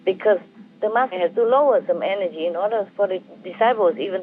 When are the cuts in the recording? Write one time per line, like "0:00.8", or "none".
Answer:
0:01.1